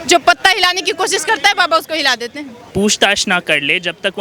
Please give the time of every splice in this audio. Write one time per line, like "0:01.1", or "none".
0:02.5

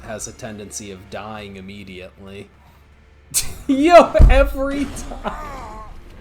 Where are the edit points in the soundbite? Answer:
none

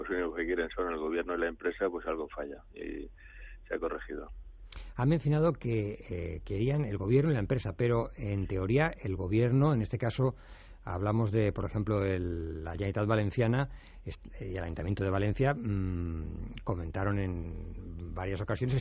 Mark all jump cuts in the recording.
0:10.1

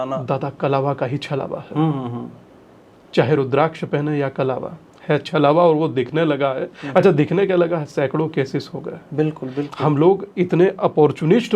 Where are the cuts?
none

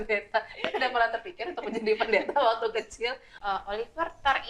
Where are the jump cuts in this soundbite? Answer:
0:03.2

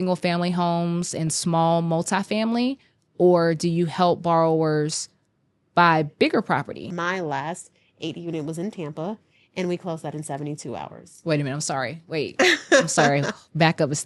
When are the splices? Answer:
0:07.0

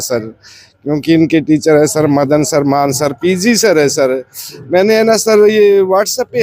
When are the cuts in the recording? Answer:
none

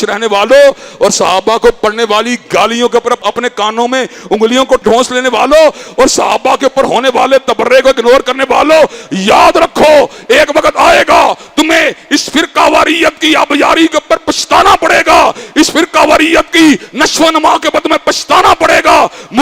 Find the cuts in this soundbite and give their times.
none

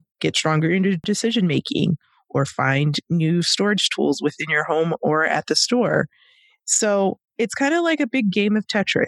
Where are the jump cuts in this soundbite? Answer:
0:01.0

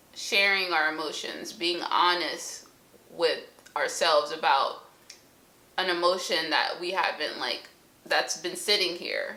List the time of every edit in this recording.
none

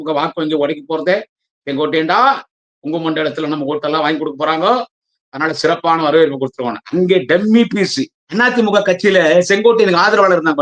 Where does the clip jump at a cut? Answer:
0:08.2

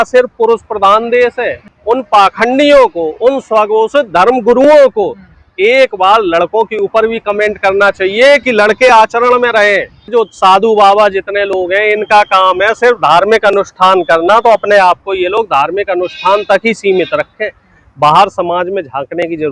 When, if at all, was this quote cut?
0:01.6
0:10.1

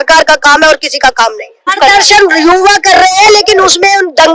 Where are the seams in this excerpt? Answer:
0:01.7

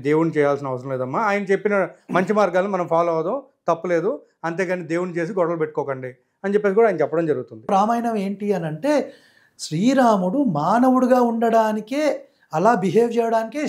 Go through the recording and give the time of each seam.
0:07.7

